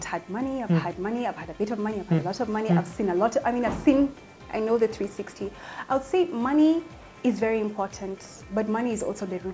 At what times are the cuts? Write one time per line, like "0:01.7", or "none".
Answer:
none